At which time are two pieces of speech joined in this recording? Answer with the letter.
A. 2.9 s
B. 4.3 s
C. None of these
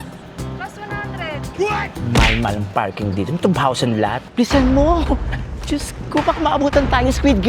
B